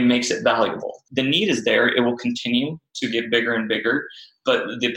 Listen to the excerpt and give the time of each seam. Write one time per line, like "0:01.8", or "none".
0:00.9